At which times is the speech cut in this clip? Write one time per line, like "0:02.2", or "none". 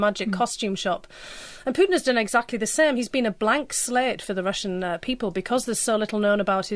0:02.0